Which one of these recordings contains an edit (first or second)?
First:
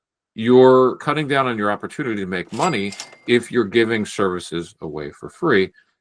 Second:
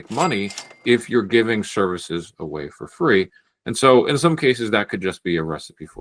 first